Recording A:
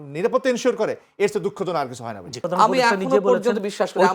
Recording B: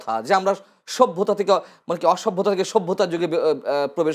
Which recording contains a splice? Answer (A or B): A